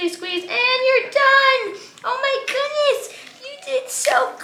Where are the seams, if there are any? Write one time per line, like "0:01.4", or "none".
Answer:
none